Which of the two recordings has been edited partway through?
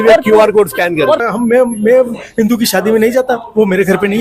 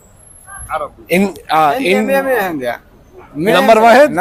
first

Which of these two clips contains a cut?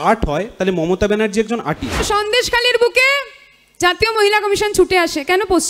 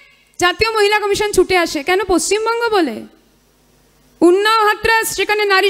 first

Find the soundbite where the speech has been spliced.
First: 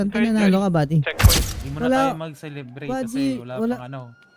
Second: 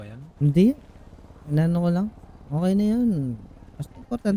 first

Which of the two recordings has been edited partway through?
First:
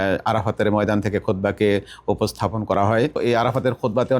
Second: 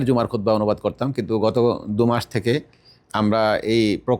first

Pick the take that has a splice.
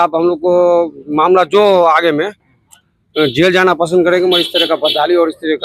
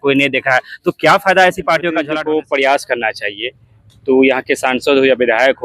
second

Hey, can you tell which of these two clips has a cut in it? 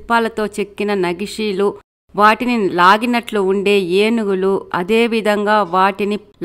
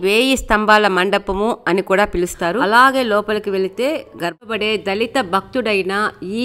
second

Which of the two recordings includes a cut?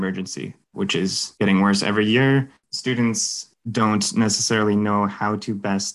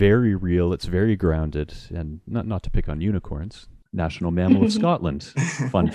first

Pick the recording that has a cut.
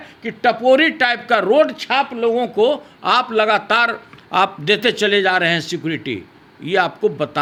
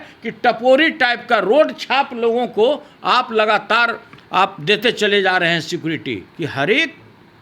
second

